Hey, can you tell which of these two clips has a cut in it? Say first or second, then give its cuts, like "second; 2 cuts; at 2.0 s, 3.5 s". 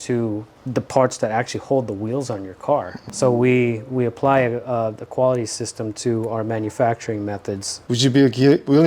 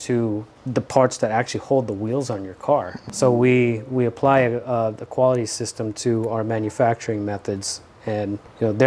first; 1 cut; at 7.8 s